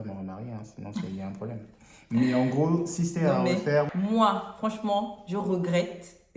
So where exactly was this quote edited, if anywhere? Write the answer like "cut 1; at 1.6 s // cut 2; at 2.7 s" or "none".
cut 1; at 3.9 s